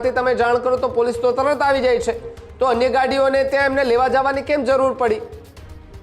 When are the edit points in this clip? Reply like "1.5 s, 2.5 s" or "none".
none